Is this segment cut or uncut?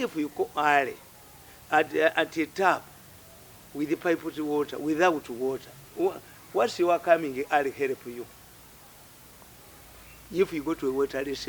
uncut